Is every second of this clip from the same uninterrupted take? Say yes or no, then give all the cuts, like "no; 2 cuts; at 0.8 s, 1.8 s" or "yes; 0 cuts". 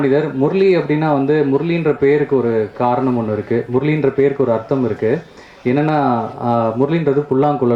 yes; 0 cuts